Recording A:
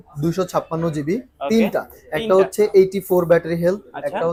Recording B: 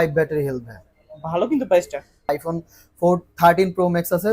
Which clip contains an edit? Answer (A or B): B